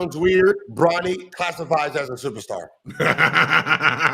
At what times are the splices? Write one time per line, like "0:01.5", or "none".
0:00.9